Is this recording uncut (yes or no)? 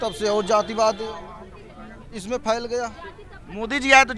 yes